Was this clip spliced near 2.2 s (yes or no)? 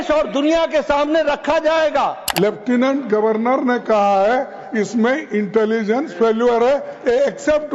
yes